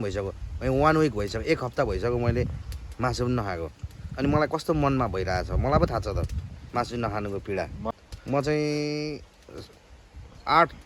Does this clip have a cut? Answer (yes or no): yes